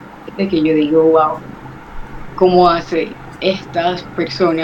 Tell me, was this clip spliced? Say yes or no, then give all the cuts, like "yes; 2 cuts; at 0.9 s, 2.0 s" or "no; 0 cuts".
no; 0 cuts